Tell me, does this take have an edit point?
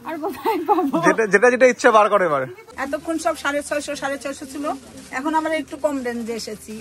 yes; 1 cut; at 2.6 s

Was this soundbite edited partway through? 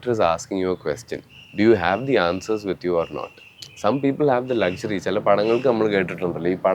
no; 0 cuts

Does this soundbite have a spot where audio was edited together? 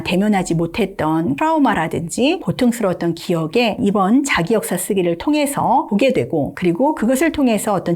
yes; 4 cuts; at 1.4 s, 2.5 s, 3.8 s, 6.1 s

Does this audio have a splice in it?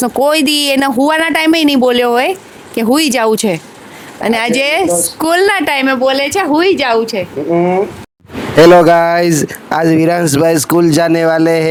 no; 0 cuts

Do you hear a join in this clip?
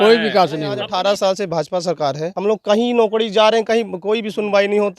yes; 2 cuts; at 0.9 s, 2.3 s

